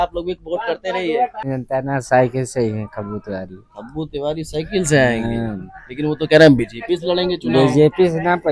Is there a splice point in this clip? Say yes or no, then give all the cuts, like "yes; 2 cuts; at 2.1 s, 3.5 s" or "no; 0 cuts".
yes; 1 cut; at 1.5 s